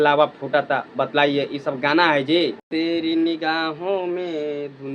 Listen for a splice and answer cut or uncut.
cut